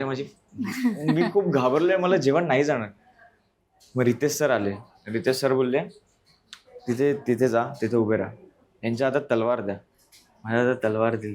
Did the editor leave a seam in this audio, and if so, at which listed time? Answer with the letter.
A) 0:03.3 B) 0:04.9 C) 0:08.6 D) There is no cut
D